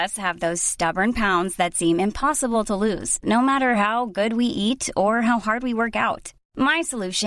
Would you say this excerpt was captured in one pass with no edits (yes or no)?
yes